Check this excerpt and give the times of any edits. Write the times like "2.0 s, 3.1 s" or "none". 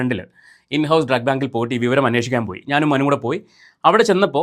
none